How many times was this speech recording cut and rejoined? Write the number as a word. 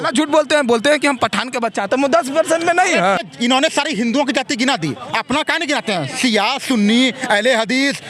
one